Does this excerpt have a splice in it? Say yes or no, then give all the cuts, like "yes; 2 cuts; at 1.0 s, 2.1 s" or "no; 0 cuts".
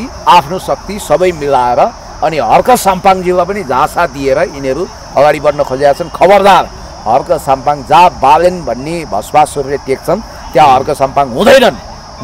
no; 0 cuts